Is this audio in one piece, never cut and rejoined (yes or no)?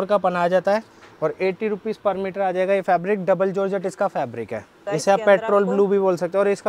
no